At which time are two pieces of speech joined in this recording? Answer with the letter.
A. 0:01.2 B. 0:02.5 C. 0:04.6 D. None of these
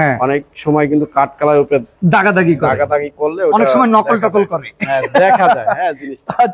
D